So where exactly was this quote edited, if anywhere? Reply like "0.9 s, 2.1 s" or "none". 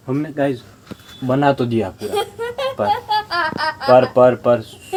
none